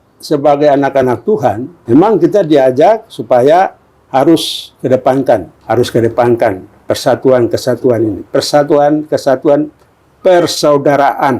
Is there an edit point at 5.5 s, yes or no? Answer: yes